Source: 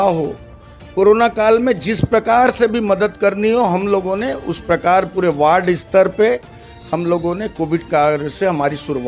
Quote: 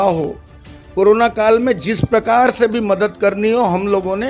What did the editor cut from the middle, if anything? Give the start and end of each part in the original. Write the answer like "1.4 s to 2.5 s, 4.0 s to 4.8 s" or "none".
none